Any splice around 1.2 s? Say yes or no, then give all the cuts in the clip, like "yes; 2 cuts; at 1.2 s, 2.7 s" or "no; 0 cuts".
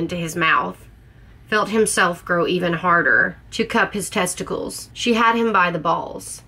no; 2 cuts; at 3.4 s, 4.8 s